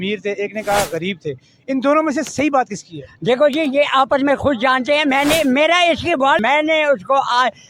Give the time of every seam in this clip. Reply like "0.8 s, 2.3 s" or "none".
6.4 s